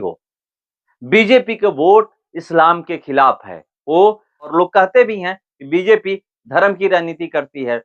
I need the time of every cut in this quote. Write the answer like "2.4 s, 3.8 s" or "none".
4.5 s